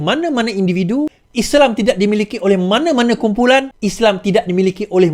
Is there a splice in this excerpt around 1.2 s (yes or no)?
yes